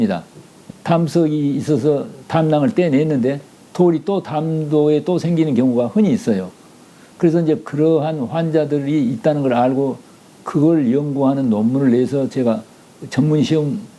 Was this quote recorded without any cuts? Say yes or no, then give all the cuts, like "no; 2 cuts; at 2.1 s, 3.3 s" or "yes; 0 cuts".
yes; 0 cuts